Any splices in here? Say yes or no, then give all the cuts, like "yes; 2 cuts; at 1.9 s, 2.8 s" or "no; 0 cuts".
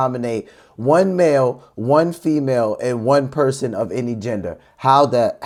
no; 0 cuts